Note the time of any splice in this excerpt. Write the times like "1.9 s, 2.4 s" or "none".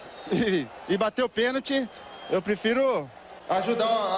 none